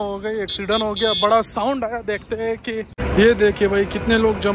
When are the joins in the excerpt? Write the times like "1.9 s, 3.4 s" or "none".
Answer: 2.9 s

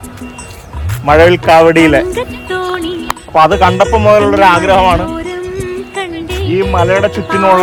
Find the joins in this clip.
none

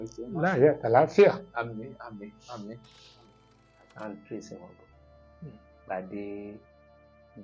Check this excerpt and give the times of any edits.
3.3 s

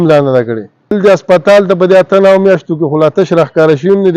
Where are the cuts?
0.9 s

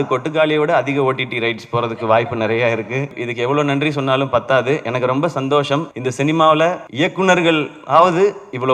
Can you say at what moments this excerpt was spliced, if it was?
3.2 s, 6.0 s, 6.8 s

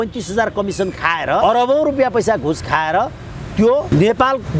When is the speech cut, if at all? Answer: 1.4 s, 3.9 s

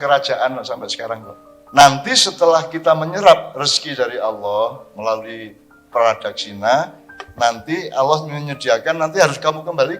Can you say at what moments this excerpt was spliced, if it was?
1.8 s

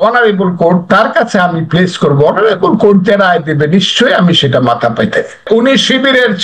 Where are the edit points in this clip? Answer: 5.5 s

